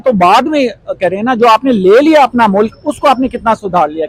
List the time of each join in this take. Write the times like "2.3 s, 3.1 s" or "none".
none